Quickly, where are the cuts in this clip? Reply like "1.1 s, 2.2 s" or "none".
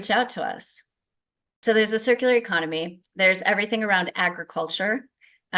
1.6 s